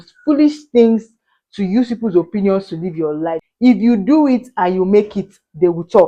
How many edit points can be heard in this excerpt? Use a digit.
1